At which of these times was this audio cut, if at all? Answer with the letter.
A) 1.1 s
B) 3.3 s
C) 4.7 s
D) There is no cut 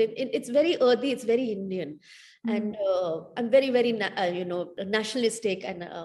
C